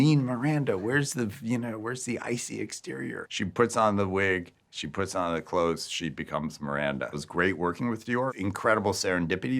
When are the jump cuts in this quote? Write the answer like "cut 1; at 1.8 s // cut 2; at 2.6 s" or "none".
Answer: cut 1; at 3.2 s // cut 2; at 7.2 s // cut 3; at 8.3 s